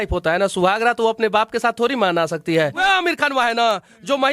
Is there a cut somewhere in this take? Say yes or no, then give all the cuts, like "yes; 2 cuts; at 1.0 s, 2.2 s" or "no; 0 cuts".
yes; 1 cut; at 2.8 s